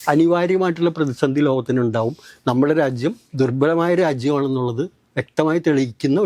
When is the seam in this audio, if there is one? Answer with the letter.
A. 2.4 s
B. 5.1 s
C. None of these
C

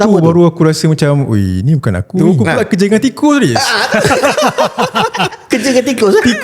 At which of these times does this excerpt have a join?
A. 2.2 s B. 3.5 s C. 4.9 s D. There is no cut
A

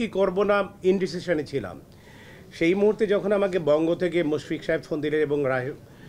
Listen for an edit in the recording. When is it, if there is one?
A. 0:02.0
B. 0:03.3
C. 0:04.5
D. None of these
D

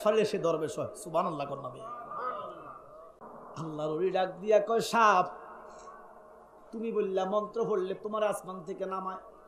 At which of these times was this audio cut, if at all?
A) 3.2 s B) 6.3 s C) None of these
A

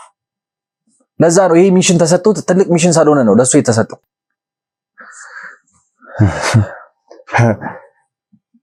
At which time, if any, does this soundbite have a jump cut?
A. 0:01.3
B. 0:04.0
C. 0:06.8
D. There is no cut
D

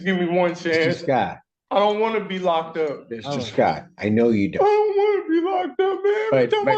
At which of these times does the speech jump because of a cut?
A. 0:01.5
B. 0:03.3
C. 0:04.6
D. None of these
D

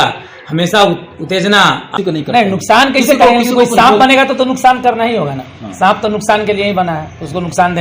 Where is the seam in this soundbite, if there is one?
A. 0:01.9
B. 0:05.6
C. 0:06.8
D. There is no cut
A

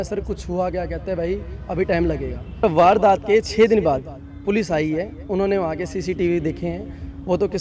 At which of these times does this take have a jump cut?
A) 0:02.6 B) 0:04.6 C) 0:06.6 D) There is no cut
A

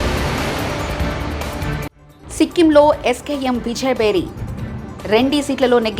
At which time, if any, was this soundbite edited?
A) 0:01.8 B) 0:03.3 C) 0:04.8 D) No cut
A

